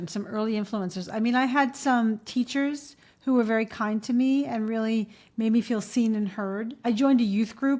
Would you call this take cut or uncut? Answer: uncut